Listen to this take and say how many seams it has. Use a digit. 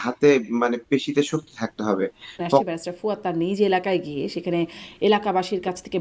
1